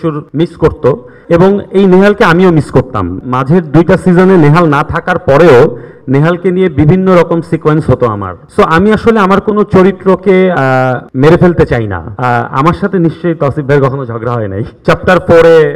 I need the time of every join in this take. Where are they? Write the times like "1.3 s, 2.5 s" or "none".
1.2 s, 3.2 s, 8.4 s, 12.1 s, 14.7 s